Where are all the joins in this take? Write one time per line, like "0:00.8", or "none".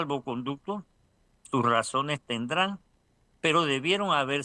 none